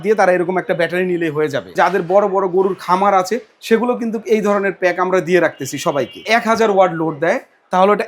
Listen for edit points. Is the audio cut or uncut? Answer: cut